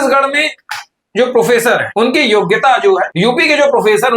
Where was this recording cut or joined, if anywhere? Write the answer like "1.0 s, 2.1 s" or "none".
1.9 s, 3.1 s